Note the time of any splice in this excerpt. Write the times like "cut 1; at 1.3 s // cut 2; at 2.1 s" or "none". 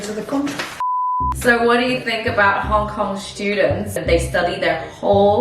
cut 1; at 1.1 s